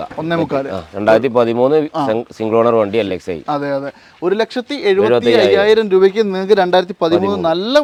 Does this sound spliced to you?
no; 0 cuts

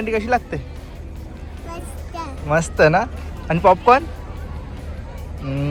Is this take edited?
no; 0 cuts

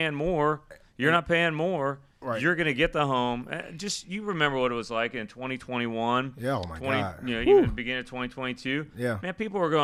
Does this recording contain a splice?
no; 0 cuts

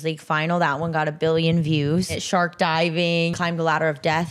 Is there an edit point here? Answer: yes; 2 cuts; at 2.2 s, 3.3 s

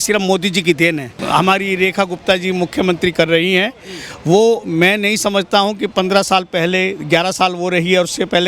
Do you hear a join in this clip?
yes; 1 cut; at 1.1 s

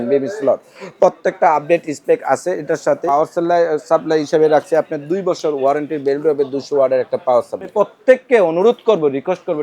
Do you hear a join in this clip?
yes; 2 cuts; at 3.0 s, 7.7 s

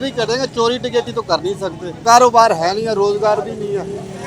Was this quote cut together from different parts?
yes; 1 cut; at 1.9 s

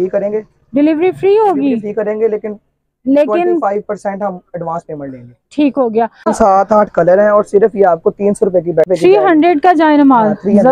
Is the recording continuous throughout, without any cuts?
no; 2 cuts; at 6.3 s, 8.9 s

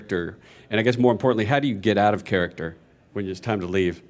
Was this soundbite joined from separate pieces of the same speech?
no; 0 cuts

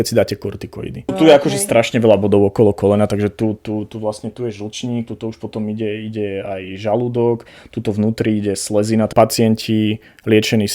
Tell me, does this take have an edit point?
yes; 2 cuts; at 1.1 s, 9.1 s

